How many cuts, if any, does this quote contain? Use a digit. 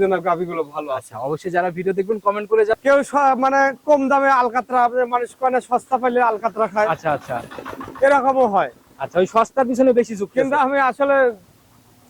1